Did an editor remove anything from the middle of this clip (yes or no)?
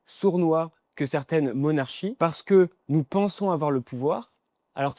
yes